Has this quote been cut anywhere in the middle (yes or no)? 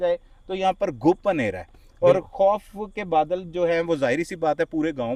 no